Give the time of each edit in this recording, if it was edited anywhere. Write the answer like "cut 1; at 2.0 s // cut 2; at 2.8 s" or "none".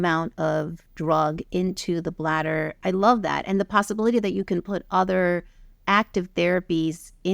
none